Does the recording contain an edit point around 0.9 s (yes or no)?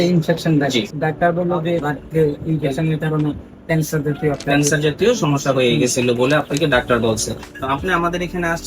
yes